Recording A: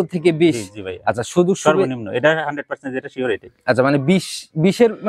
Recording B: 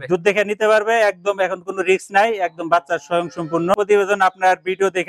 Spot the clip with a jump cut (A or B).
B